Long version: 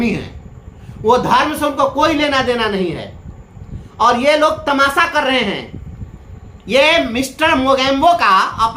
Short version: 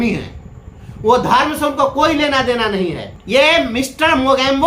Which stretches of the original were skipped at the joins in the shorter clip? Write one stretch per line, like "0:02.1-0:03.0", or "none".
0:03.1-0:06.5